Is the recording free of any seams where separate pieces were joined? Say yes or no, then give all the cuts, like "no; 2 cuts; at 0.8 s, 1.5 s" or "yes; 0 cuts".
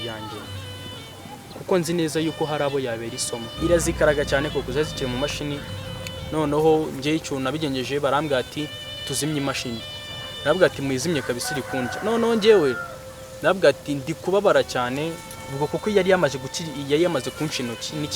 no; 1 cut; at 3.5 s